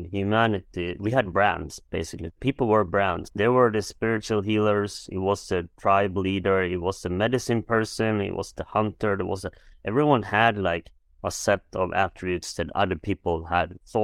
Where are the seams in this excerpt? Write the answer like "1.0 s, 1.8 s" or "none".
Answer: 0.9 s, 3.2 s